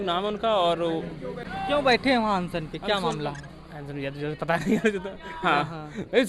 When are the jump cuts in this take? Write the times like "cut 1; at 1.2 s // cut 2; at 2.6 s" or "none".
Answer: cut 1; at 1.5 s